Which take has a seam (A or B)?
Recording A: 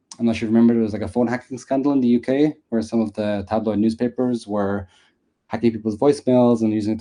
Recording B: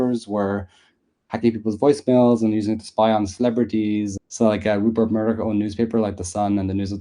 B